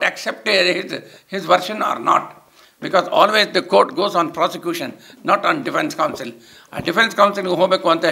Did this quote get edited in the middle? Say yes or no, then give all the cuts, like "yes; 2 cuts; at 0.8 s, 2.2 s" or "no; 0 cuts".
no; 0 cuts